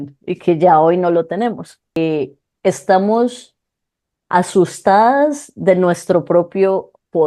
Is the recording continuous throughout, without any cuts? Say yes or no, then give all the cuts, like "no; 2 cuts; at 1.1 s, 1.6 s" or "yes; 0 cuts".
no; 1 cut; at 2.0 s